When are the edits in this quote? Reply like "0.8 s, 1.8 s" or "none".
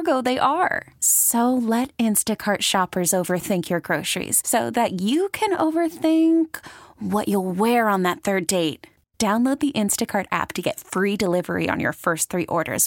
none